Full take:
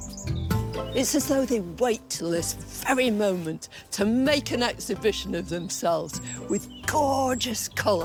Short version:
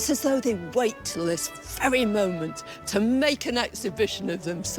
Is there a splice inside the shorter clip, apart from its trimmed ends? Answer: no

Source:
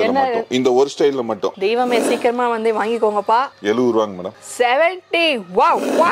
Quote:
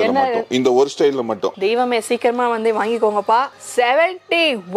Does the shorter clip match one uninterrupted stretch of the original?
no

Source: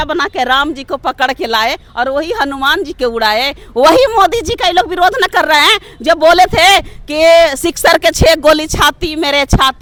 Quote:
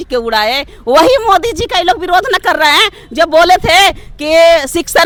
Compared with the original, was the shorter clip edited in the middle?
no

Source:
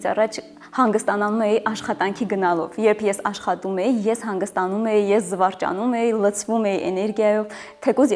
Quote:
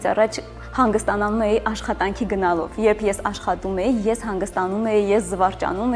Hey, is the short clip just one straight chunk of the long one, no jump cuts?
yes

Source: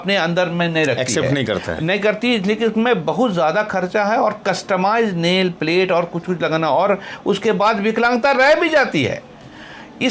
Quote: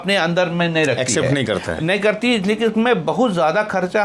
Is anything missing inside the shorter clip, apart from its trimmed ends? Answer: no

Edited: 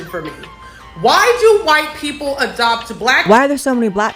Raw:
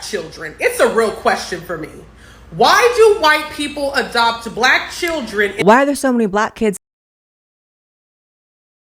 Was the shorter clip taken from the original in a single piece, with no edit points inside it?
no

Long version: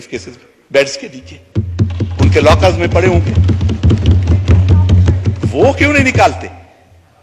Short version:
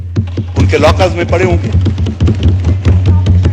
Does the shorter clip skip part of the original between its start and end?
no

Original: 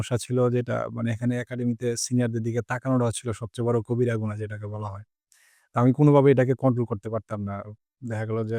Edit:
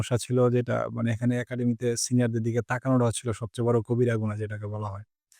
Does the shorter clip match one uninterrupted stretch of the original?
yes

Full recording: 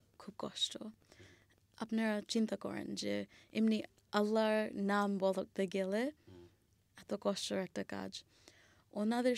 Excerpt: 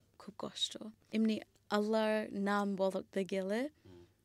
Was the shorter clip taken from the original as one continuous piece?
no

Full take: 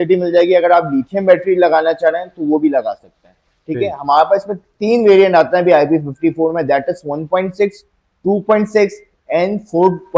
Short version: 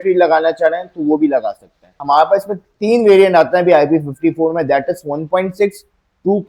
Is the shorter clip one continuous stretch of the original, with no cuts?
no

